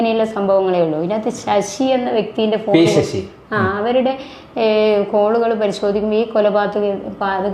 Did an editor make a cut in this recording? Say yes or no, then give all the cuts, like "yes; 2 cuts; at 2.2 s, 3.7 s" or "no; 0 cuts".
no; 0 cuts